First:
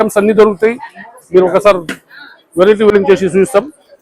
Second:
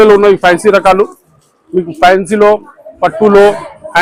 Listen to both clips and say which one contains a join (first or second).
first